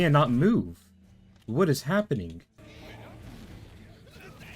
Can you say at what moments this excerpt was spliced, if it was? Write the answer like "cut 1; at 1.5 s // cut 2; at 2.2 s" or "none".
cut 1; at 2.5 s